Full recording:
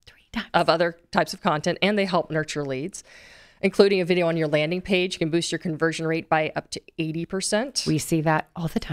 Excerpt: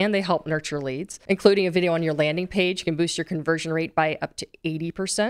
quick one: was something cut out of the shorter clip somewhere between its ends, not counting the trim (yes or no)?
yes